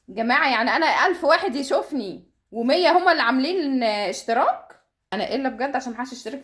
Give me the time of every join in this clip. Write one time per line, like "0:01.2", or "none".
0:05.1